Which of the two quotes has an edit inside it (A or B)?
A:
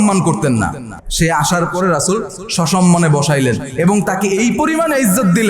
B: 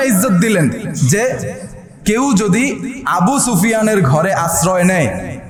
A